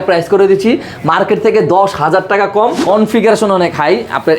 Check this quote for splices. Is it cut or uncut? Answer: cut